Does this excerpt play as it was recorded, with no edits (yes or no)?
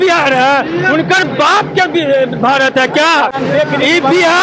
yes